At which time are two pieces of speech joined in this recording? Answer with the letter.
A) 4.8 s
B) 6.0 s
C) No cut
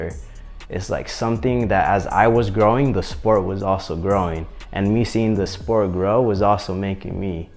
C